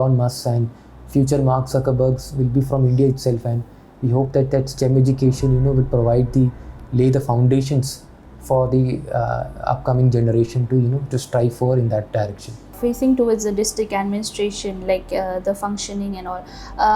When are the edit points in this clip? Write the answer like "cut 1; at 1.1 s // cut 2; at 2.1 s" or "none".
none